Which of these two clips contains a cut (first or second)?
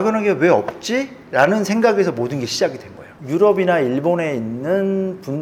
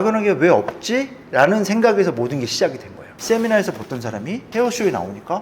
second